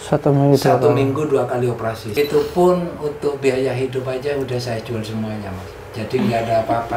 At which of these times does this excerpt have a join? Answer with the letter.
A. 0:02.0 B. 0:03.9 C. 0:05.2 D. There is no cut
A